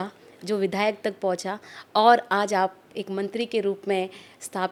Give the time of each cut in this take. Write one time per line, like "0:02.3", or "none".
none